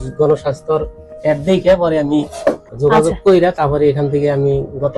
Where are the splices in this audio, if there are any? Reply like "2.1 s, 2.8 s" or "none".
2.7 s